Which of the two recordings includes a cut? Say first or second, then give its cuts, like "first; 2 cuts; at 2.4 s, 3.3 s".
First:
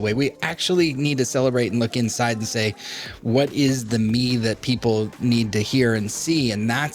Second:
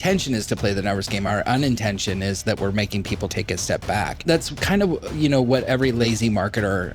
second; 4 cuts; at 1.3 s, 3.3 s, 4.2 s, 5.8 s